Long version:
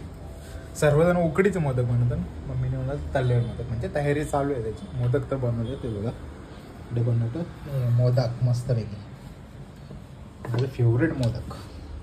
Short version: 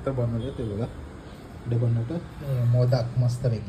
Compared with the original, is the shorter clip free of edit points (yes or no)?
yes